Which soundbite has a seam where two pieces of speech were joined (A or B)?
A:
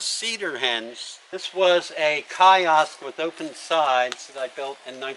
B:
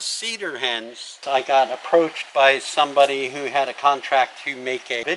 B